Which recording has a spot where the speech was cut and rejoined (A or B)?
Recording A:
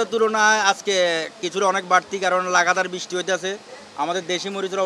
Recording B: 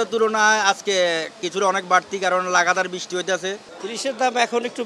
B